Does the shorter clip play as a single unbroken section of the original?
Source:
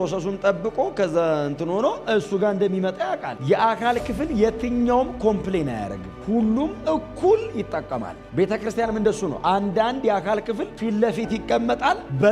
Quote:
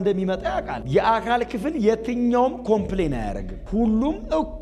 yes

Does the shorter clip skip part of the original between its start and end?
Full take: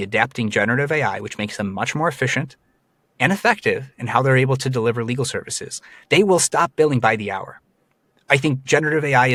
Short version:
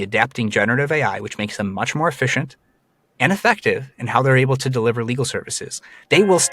no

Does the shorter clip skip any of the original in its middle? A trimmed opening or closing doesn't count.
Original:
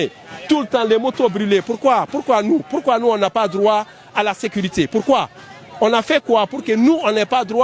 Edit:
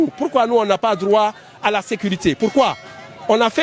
no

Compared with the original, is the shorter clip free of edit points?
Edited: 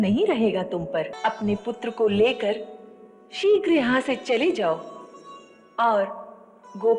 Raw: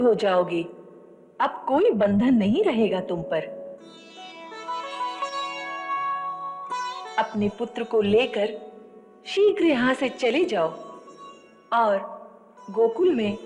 no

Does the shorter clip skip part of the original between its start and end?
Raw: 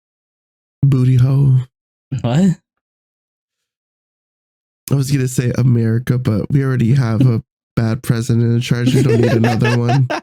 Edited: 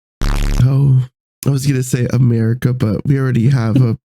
yes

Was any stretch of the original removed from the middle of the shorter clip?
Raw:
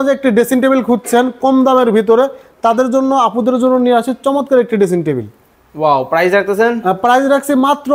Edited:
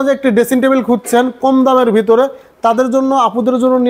no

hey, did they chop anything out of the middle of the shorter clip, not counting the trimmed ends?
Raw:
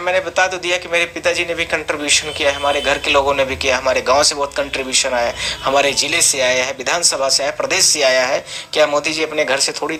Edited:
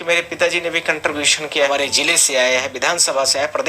yes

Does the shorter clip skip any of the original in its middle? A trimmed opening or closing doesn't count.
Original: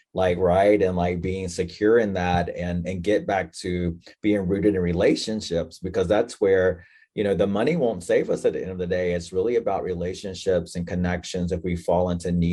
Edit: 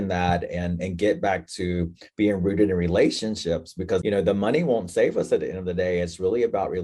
yes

